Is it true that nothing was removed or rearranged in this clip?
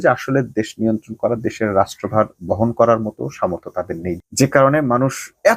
no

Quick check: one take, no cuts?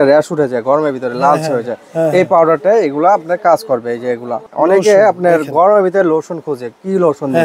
no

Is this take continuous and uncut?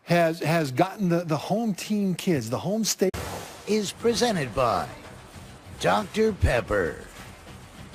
yes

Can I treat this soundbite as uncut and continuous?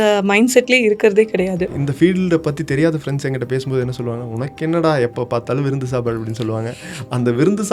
no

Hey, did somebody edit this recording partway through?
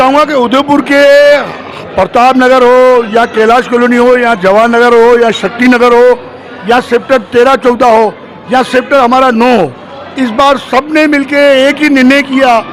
no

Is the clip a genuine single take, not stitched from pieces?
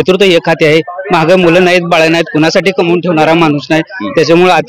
yes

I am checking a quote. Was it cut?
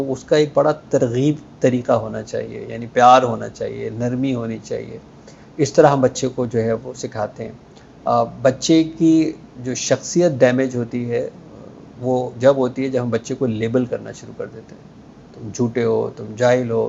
no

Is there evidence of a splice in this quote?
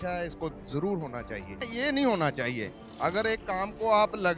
yes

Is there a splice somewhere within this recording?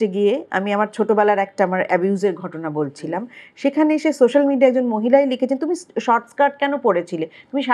no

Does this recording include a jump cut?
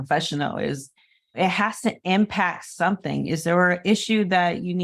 yes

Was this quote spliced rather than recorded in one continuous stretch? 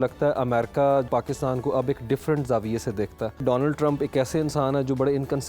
yes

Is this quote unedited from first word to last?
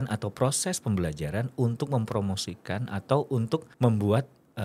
no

